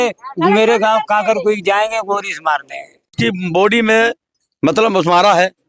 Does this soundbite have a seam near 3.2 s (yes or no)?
yes